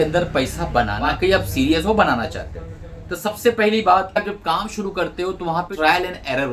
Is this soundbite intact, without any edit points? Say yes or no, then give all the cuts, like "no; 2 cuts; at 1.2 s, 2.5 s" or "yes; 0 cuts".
no; 3 cuts; at 1.0 s, 4.2 s, 5.7 s